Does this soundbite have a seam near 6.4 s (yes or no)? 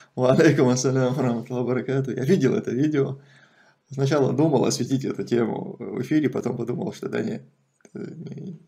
no